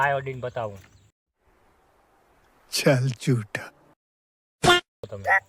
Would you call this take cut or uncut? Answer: uncut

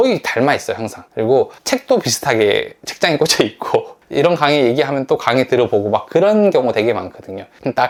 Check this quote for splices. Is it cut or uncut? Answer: uncut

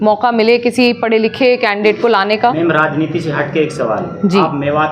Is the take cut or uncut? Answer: cut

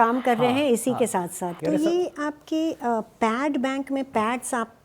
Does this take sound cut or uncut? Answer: cut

